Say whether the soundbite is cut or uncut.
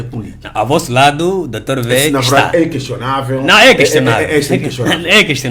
uncut